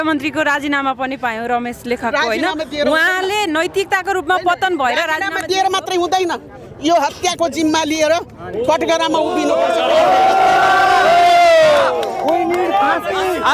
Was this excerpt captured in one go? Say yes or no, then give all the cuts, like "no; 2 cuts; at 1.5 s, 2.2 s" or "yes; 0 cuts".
yes; 0 cuts